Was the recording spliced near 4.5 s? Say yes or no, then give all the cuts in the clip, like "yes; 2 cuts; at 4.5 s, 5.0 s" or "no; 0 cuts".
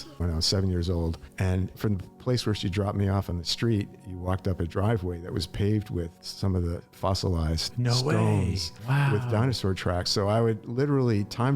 no; 1 cut; at 1.6 s